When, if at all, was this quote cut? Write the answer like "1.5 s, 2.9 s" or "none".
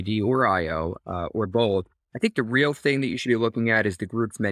2.0 s